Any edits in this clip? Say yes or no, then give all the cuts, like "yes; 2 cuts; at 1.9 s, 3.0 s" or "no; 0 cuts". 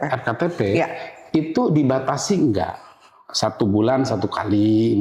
no; 0 cuts